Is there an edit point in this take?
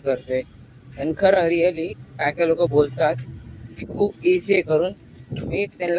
no; 0 cuts

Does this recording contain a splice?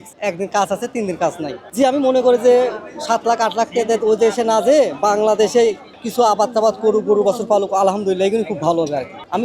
yes; 1 cut; at 1.6 s

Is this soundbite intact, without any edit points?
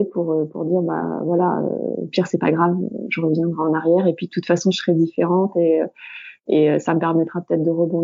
yes; 0 cuts

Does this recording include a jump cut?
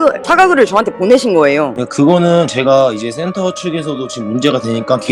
no; 0 cuts

